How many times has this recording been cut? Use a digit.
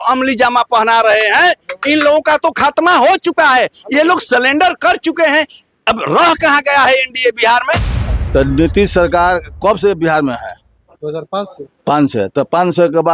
1